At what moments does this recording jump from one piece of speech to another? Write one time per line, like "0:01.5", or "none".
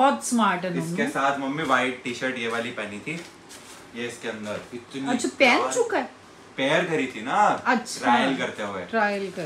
none